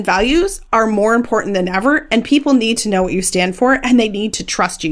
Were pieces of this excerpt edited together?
no; 0 cuts

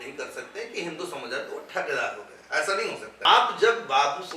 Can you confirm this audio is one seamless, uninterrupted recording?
no; 1 cut; at 3.3 s

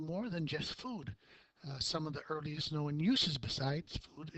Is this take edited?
yes; 1 cut; at 2.7 s

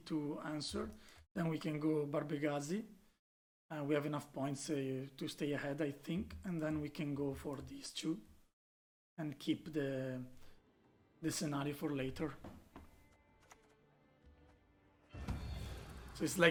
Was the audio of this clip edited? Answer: no; 0 cuts

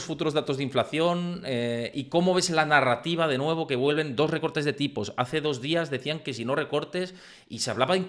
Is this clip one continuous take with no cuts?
yes; 0 cuts

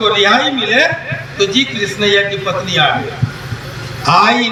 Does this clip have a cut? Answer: no; 0 cuts

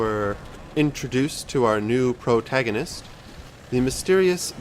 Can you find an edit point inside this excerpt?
yes; 1 cut; at 3.6 s

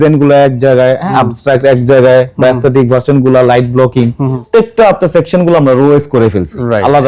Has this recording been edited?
yes; 2 cuts; at 1.1 s, 4.4 s

